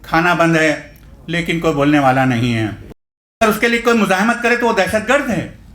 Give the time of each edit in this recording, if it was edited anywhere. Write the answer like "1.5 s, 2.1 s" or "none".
3.4 s